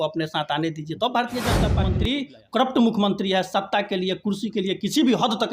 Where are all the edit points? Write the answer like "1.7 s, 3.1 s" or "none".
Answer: 1.8 s